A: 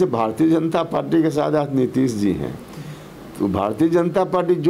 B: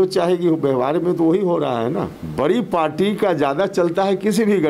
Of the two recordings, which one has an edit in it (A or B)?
B